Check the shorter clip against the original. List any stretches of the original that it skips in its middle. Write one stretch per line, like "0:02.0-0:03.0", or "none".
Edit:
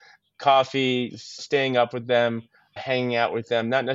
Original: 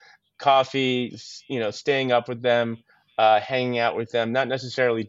0:01.4-0:01.8
0:03.1-0:03.4